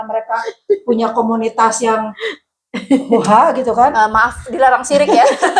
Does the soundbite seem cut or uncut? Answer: uncut